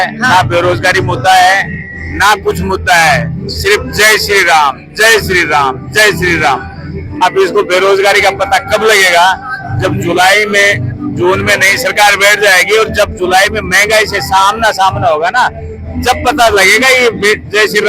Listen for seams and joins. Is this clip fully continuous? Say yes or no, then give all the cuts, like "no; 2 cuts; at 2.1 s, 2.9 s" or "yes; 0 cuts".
yes; 0 cuts